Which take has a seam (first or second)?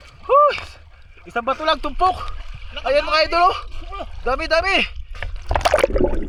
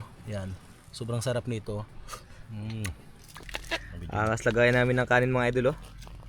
second